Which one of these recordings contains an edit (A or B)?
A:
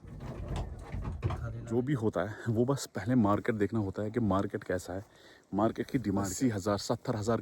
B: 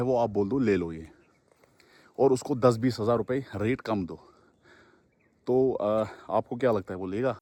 A